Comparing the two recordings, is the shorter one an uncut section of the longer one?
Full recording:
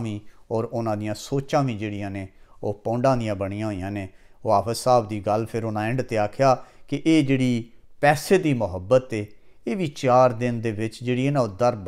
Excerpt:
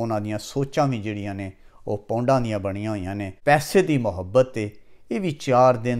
no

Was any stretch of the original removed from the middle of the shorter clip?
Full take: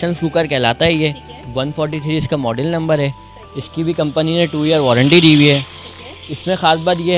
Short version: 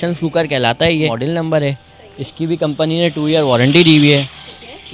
yes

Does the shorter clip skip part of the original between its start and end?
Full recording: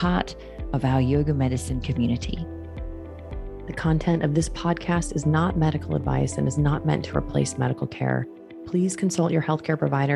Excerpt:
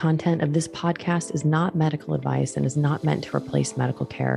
no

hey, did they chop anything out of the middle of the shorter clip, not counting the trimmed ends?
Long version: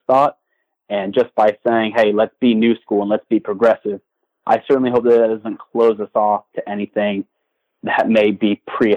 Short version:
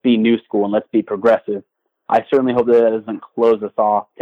no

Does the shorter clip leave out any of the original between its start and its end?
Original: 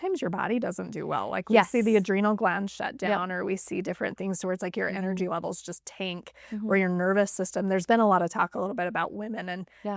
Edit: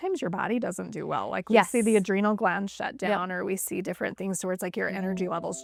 no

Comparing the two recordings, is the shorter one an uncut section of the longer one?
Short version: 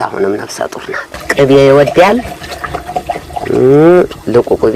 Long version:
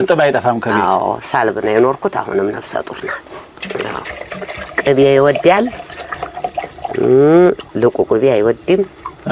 no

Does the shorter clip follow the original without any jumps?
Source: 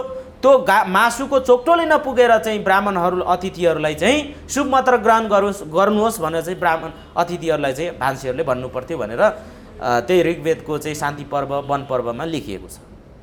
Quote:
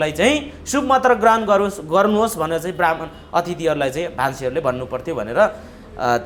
yes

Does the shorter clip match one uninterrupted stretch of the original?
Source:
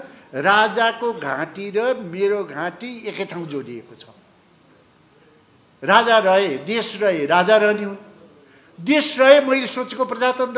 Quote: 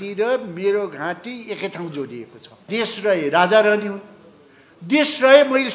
no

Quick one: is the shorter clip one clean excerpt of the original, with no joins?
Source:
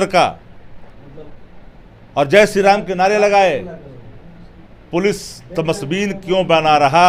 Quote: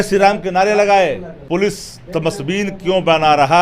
no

